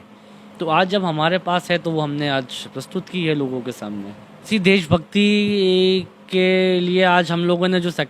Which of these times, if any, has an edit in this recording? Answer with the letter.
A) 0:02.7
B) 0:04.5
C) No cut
B